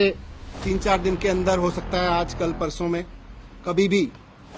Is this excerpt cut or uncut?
uncut